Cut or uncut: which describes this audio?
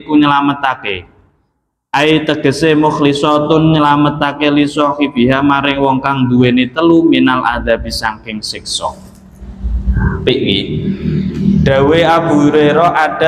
uncut